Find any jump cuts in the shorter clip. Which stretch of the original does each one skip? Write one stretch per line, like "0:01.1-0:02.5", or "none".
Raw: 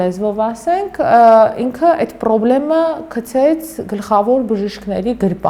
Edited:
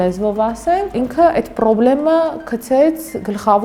0:00.9-0:01.6